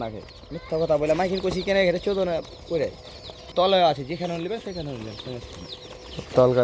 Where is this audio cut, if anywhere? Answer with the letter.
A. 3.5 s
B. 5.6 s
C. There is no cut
A